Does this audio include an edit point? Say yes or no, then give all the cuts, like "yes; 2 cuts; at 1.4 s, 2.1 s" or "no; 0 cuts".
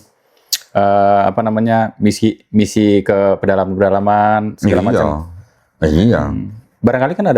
no; 0 cuts